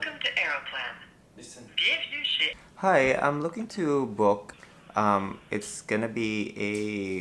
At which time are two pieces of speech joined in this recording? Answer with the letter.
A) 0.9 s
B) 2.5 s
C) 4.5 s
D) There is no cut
C